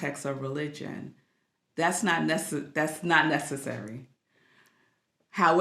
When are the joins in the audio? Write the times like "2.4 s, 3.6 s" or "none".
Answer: none